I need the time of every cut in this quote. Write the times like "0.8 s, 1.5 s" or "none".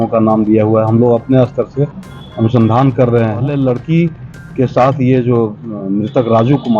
3.5 s